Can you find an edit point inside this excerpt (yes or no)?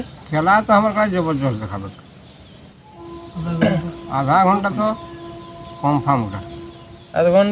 no